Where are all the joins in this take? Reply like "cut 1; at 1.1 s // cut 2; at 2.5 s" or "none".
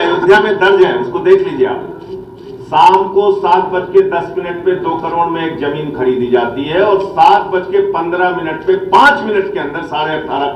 none